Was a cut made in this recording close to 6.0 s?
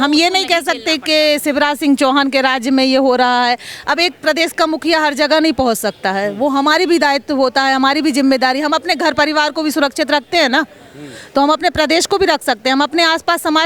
no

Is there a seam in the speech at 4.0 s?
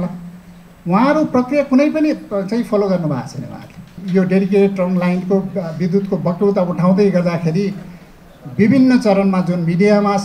yes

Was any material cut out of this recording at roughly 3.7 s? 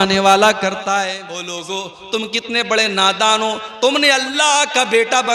no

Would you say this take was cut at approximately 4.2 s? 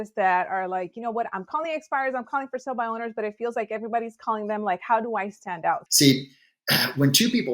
no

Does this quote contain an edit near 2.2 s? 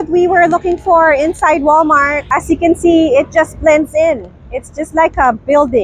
yes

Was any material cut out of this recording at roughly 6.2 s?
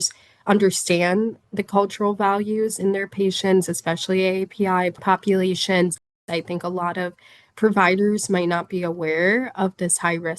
yes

